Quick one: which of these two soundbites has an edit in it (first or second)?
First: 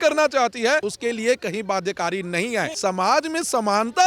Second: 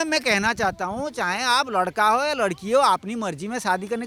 first